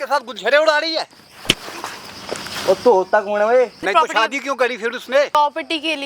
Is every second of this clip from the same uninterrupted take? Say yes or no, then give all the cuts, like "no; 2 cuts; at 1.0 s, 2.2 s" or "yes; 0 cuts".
no; 3 cuts; at 1.3 s, 3.8 s, 5.4 s